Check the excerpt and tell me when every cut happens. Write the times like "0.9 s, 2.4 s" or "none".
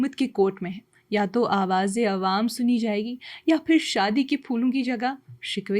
none